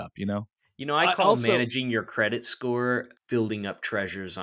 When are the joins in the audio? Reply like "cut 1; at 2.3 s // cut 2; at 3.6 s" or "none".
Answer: cut 1; at 3.1 s